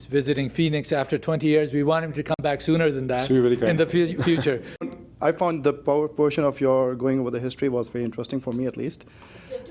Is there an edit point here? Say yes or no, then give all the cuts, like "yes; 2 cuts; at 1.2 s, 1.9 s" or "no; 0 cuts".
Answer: yes; 1 cut; at 4.8 s